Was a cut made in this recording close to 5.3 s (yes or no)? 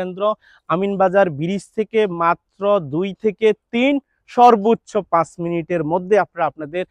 no